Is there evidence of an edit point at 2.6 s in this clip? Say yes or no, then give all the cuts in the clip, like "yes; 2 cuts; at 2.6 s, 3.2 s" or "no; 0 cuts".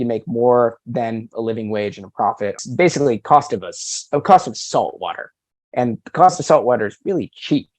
yes; 1 cut; at 2.6 s